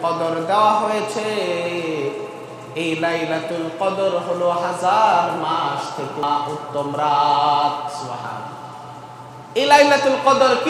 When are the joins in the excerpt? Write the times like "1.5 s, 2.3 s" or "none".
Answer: 6.2 s